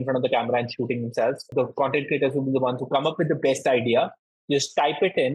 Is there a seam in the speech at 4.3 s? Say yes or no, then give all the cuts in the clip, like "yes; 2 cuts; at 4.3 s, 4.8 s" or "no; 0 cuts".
no; 1 cut; at 1.5 s